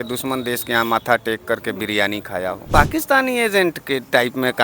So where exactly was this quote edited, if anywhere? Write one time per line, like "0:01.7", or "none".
0:02.7